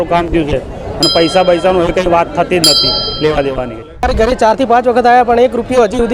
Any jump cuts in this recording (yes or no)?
yes